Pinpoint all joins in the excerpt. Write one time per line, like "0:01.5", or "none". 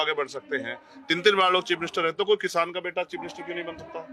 none